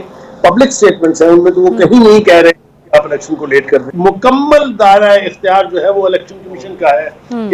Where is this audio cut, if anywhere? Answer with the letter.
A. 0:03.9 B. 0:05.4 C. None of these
A